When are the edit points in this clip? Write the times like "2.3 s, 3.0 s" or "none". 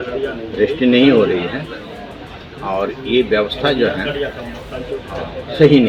none